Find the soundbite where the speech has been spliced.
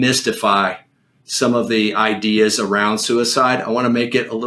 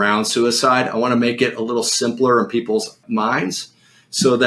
second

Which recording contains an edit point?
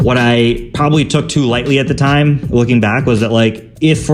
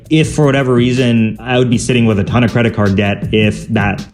second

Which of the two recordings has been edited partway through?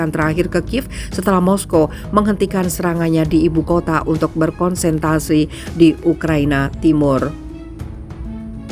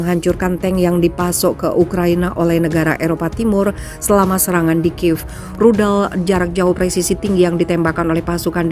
first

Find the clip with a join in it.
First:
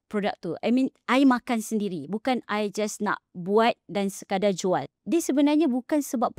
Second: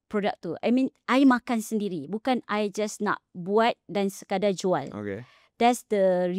first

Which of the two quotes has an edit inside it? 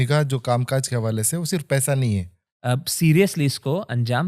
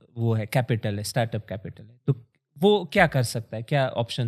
first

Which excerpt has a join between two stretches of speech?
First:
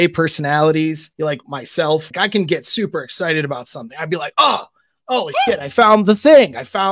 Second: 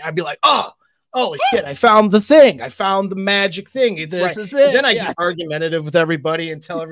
first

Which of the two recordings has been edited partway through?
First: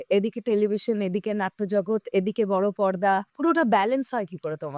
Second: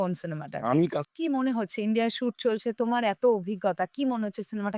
second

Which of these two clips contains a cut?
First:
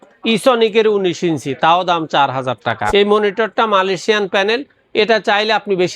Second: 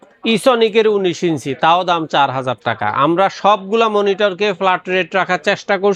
first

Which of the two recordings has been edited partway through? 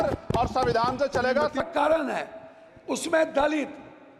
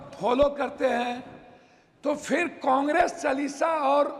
first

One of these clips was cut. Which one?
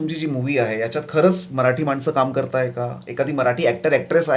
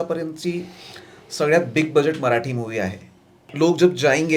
second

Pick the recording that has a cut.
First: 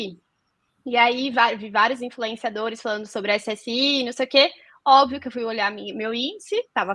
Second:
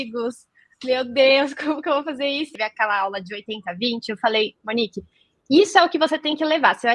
second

